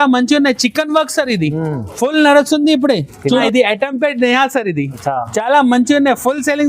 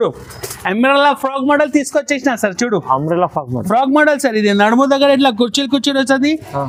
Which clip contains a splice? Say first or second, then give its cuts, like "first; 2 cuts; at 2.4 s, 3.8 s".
first; 1 cut; at 3.2 s